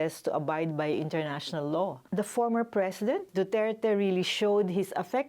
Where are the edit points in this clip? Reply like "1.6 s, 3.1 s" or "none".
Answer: 2.0 s, 3.3 s